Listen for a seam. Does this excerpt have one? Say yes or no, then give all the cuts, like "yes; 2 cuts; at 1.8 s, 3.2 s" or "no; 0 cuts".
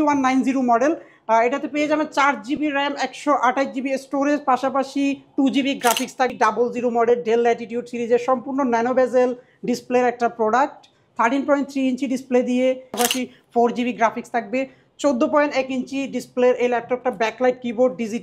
yes; 2 cuts; at 6.3 s, 13.0 s